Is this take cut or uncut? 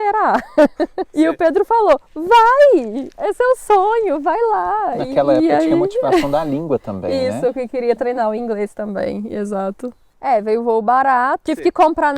cut